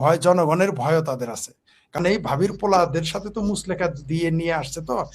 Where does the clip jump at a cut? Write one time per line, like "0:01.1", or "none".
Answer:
0:02.0